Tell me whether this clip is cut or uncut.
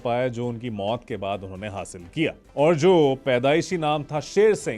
cut